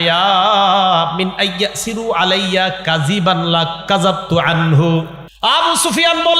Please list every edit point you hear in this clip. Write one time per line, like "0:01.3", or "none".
0:05.2